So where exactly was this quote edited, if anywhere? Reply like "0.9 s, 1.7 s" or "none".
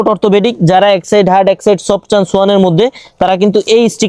none